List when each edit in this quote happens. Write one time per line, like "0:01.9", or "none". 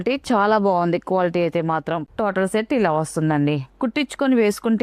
0:02.1
0:03.7